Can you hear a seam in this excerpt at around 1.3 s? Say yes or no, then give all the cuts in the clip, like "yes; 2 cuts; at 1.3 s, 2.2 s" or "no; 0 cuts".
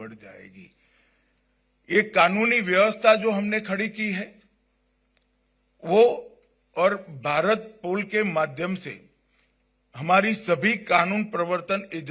no; 0 cuts